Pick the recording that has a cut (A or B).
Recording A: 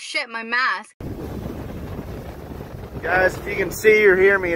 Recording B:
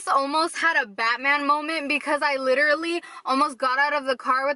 A